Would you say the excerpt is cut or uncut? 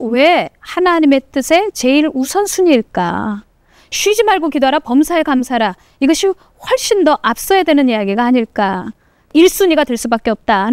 cut